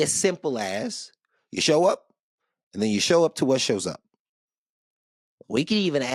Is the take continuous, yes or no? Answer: yes